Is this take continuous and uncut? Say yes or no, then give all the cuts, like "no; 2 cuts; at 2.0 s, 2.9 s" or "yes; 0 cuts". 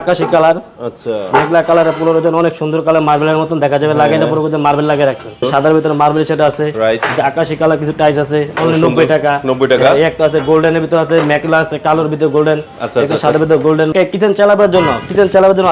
no; 2 cuts; at 5.4 s, 13.9 s